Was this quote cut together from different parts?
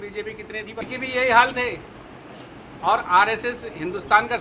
yes; 1 cut; at 1.0 s

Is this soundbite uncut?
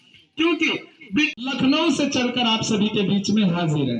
no; 1 cut; at 1.3 s

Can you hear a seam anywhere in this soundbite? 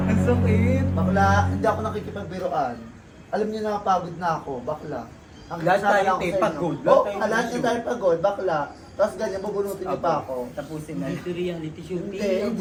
no; 0 cuts

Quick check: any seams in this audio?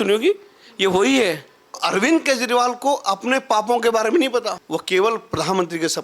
yes; 2 cuts; at 1.8 s, 4.6 s

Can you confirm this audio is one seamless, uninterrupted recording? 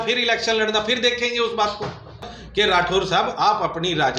no; 1 cut; at 2.3 s

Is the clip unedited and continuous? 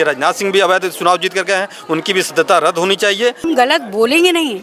no; 1 cut; at 3.5 s

